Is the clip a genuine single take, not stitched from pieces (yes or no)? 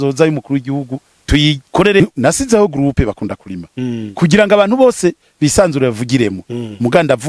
no